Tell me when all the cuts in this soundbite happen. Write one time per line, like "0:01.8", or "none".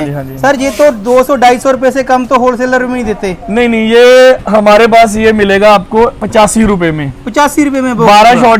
none